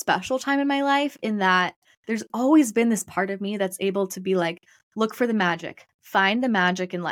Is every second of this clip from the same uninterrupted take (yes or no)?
yes